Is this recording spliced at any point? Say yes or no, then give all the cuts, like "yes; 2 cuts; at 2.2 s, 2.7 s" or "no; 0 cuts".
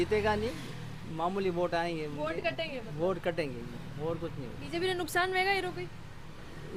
no; 0 cuts